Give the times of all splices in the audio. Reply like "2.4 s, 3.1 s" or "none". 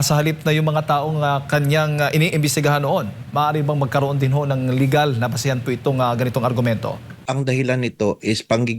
7.2 s